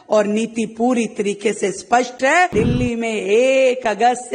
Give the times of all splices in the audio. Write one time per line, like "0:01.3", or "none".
0:02.5